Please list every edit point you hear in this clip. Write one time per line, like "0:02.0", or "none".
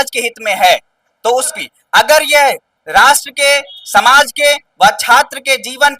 0:01.5